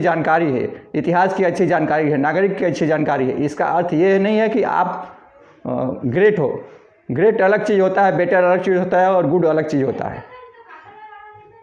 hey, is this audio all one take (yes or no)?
yes